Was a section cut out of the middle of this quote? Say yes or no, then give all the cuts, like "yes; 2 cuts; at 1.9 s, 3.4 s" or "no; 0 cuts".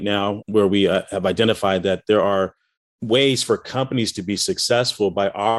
no; 0 cuts